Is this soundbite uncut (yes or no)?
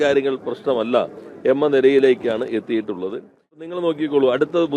no